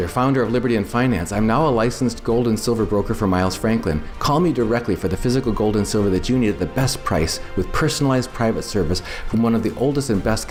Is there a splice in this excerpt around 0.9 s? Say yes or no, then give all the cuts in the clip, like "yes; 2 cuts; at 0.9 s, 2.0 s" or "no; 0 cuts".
no; 0 cuts